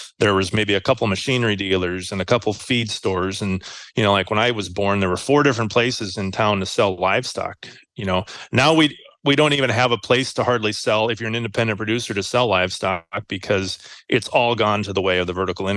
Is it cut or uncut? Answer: uncut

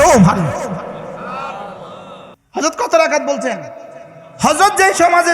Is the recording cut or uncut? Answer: cut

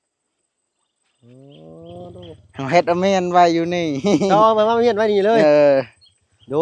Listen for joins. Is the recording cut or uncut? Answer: uncut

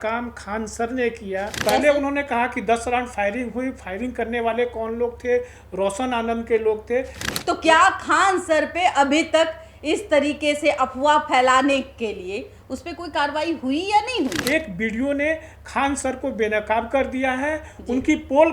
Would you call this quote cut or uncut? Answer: cut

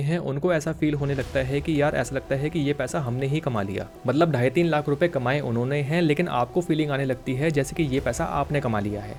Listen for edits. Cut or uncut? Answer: uncut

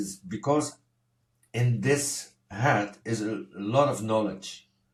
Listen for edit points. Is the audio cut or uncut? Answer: uncut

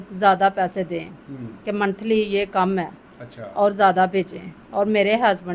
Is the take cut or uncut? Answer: uncut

